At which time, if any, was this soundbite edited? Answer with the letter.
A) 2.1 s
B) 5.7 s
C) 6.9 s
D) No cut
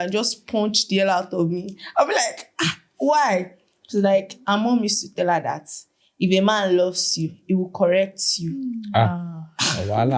D